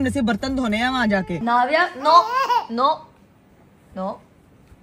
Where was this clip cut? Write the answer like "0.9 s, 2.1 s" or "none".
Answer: 1.3 s